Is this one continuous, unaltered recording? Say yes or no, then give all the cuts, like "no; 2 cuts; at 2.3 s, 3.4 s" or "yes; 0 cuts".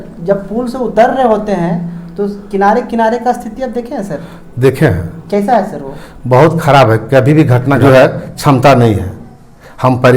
no; 1 cut; at 7.7 s